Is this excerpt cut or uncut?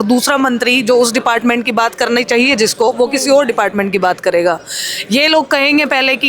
uncut